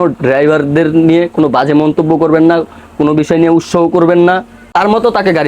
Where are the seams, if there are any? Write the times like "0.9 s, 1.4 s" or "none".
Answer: 4.6 s